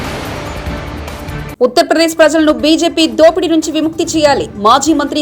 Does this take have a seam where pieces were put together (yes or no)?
yes